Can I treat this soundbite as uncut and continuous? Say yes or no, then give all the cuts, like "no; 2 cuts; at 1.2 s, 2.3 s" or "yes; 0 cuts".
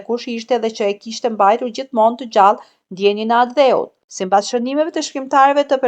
no; 1 cut; at 4.1 s